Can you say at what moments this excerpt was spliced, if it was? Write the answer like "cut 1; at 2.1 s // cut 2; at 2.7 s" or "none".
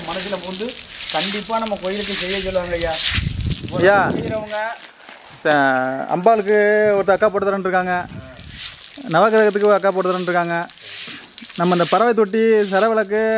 none